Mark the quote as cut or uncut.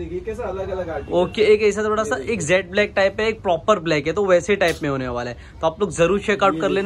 uncut